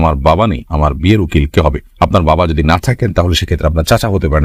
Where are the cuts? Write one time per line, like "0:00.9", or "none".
none